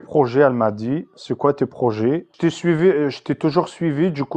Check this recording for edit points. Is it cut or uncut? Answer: cut